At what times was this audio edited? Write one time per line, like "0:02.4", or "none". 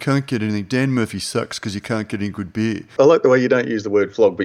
0:02.9